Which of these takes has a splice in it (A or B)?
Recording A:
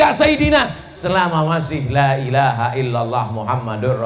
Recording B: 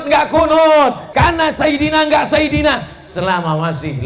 B